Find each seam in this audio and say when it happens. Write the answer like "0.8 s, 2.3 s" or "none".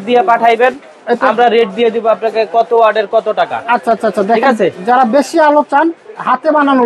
none